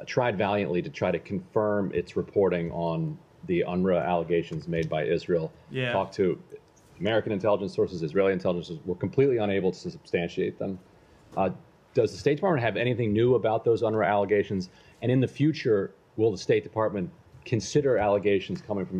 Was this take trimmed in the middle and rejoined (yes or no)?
no